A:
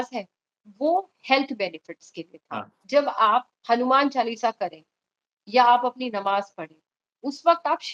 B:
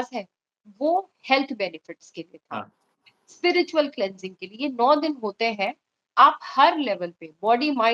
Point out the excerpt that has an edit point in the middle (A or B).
A